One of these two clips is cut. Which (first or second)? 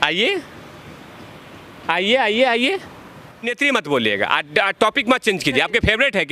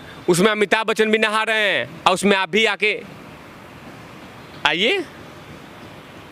first